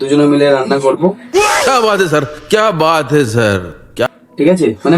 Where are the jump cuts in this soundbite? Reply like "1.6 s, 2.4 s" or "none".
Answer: 1.5 s, 3.7 s